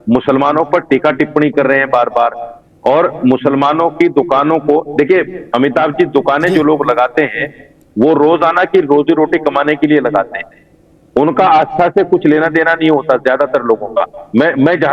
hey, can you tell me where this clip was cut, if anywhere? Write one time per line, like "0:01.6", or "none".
none